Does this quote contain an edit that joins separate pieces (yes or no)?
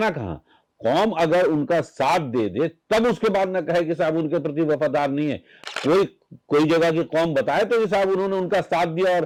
no